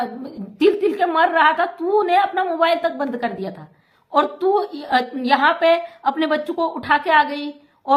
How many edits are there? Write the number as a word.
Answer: zero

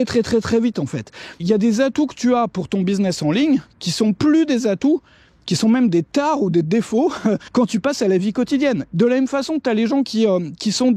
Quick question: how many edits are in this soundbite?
two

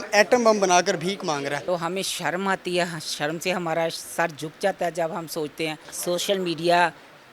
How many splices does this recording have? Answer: two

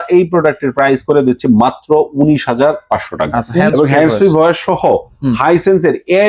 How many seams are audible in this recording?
one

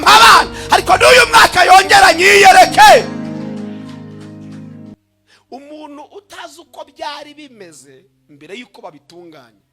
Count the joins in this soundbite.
one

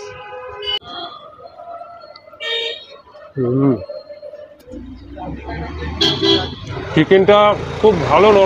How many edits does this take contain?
two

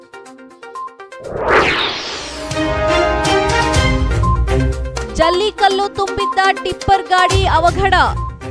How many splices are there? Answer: one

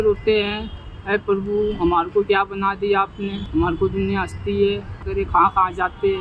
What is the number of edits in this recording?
two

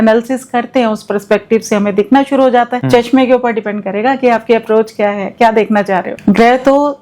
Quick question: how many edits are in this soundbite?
two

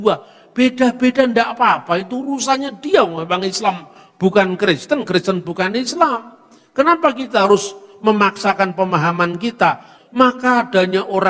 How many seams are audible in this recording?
one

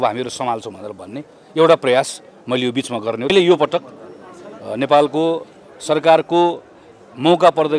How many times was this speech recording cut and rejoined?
one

